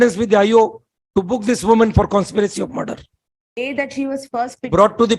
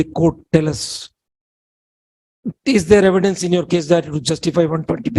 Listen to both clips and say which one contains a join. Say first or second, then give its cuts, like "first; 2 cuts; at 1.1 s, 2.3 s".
first; 1 cut; at 3.6 s